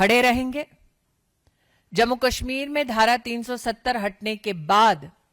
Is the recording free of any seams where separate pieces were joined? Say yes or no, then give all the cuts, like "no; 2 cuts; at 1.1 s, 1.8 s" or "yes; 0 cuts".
yes; 0 cuts